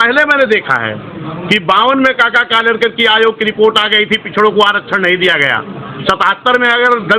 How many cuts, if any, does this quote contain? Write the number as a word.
zero